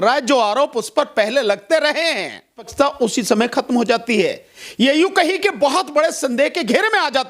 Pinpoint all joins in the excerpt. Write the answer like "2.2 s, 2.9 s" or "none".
2.7 s